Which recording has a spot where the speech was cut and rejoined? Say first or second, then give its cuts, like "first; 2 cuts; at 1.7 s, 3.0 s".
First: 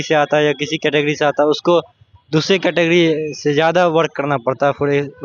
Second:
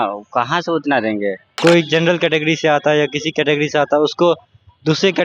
second; 1 cut; at 1.5 s